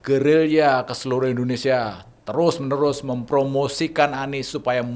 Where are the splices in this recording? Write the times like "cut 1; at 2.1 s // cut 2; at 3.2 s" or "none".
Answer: none